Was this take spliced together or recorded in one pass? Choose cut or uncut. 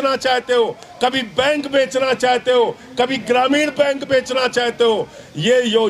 uncut